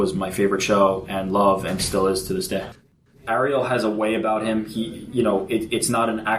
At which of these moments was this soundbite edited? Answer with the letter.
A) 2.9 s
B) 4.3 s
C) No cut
A